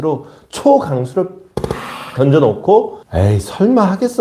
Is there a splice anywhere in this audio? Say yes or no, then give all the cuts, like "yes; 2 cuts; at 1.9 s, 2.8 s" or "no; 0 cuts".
yes; 1 cut; at 3.0 s